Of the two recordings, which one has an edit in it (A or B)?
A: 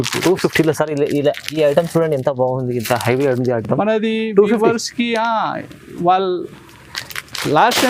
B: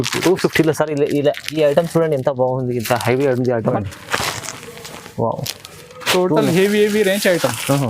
B